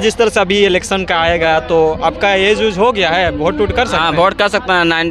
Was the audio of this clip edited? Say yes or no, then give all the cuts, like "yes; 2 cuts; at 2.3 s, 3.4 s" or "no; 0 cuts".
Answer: no; 0 cuts